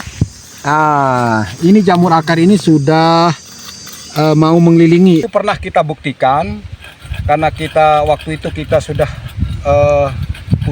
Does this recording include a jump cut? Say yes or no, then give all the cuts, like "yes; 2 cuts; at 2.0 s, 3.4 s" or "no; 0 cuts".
yes; 1 cut; at 5.3 s